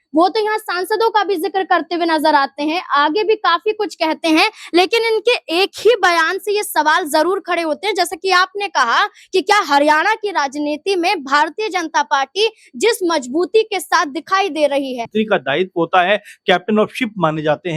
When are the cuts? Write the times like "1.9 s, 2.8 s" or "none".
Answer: 15.1 s